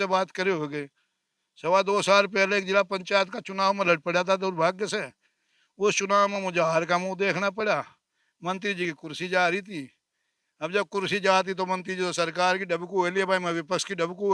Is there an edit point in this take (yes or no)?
no